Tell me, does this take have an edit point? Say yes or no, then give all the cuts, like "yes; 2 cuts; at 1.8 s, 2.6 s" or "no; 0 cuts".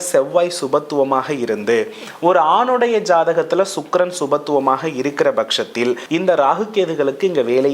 yes; 1 cut; at 6.0 s